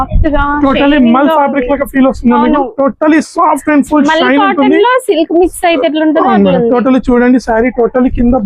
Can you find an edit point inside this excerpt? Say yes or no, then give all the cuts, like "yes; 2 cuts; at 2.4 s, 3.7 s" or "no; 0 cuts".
no; 0 cuts